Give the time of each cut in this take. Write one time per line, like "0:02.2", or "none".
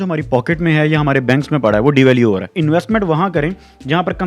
0:02.5